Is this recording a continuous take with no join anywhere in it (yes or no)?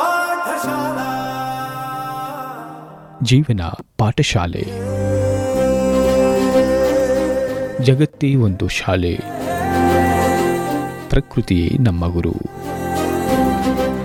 yes